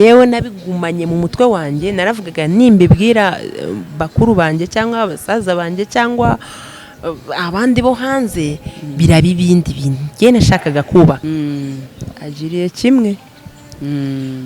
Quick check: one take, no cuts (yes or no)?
no